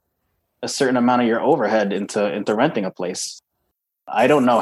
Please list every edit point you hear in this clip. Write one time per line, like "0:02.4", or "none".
0:03.5